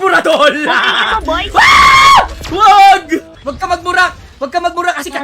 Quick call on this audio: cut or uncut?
cut